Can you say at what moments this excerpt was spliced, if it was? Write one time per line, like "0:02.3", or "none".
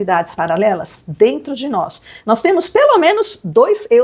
none